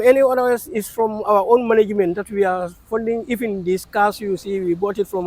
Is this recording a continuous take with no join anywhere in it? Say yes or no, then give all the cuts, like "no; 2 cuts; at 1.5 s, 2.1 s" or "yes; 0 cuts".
yes; 0 cuts